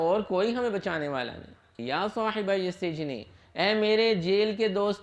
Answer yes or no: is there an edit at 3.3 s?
no